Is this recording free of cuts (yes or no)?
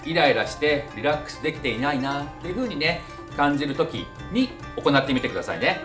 no